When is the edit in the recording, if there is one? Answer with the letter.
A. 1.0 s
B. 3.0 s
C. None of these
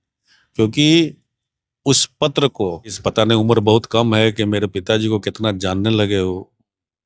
B